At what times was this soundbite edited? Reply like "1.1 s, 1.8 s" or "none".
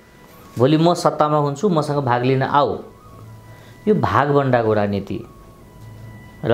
none

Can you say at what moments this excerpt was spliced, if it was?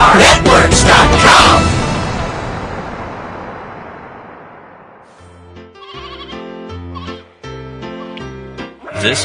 5.4 s

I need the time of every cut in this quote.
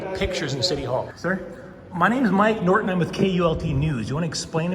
1.1 s

